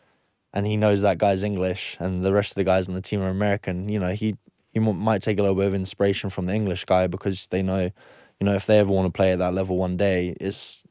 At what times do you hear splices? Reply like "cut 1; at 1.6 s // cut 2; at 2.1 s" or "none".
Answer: none